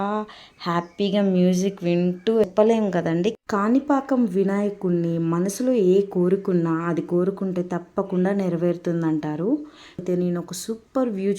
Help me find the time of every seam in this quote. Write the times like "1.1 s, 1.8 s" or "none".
2.4 s, 10.0 s